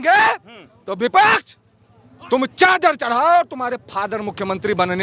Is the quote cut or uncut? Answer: uncut